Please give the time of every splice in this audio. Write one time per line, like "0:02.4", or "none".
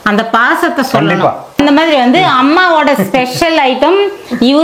0:01.6